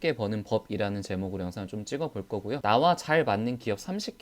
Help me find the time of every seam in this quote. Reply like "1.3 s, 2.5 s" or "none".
2.6 s